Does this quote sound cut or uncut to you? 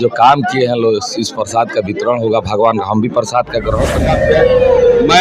cut